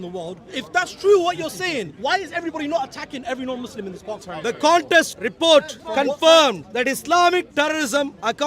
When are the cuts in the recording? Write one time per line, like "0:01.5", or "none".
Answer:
0:01.9
0:04.1
0:05.2
0:05.8
0:06.7